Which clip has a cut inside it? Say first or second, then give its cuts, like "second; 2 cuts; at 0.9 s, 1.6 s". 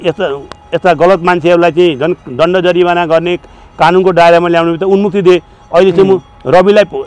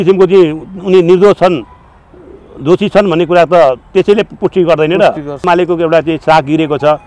second; 1 cut; at 5.4 s